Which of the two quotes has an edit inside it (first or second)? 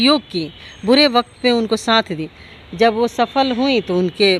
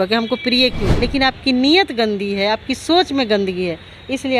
second